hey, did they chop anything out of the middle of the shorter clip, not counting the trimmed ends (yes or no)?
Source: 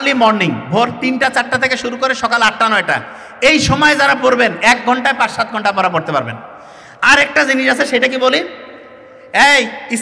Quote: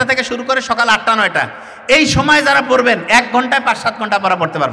no